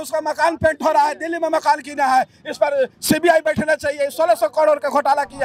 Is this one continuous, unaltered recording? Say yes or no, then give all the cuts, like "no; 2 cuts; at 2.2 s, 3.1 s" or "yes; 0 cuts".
yes; 0 cuts